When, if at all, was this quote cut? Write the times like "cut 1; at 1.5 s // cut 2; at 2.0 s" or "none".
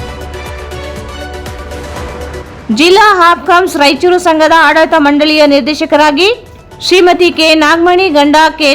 none

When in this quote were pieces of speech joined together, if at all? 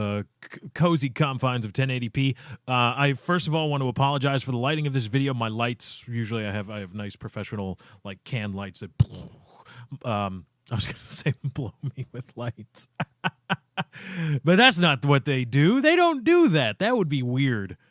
none

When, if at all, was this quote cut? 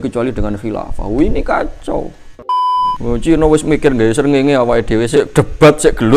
cut 1; at 2.8 s // cut 2; at 5.1 s

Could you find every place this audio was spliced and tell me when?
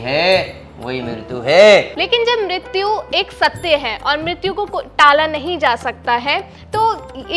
cut 1; at 2.0 s

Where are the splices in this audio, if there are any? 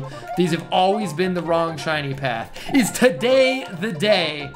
none

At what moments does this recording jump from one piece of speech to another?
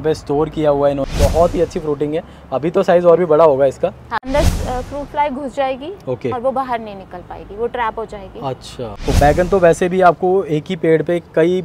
cut 1; at 1.0 s // cut 2; at 4.2 s // cut 3; at 9.0 s

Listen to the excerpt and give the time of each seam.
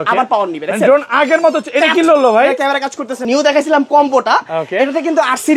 cut 1; at 3.2 s

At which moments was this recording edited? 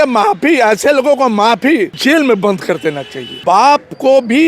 cut 1; at 2.0 s // cut 2; at 3.4 s

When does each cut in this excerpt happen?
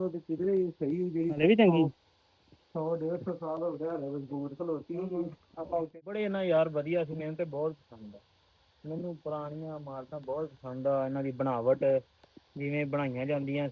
cut 1; at 5.9 s

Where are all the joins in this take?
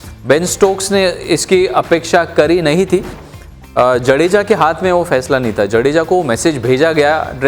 cut 1; at 3.2 s

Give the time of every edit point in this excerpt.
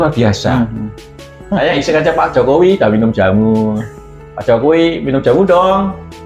cut 1; at 1.2 s

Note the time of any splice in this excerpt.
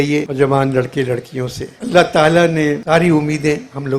cut 1; at 2.8 s

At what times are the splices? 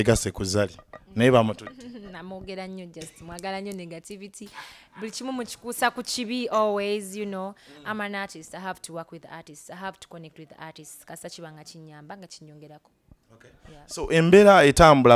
none

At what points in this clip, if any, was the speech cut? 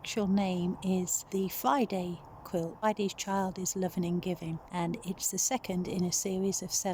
cut 1; at 1.2 s // cut 2; at 2.8 s // cut 3; at 4.6 s

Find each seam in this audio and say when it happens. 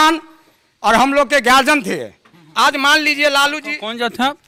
none

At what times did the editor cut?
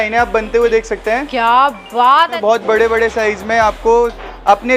cut 1; at 2.4 s

